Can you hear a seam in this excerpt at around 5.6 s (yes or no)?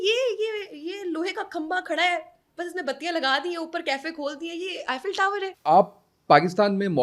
yes